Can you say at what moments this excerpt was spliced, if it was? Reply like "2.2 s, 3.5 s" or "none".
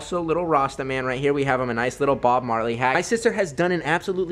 3.0 s